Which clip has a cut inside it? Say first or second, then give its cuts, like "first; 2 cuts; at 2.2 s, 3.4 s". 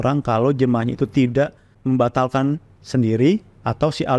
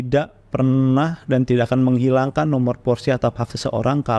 first; 1 cut; at 1.7 s